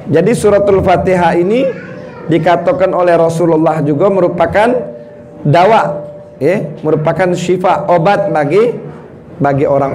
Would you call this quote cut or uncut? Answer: uncut